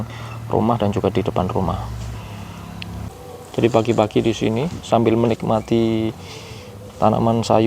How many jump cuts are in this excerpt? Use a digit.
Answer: 1